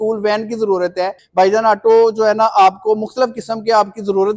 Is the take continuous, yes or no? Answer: no